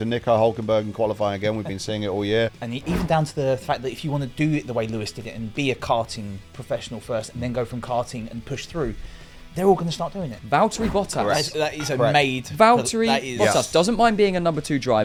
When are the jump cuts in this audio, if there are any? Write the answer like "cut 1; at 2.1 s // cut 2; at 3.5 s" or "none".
cut 1; at 2.5 s // cut 2; at 10.3 s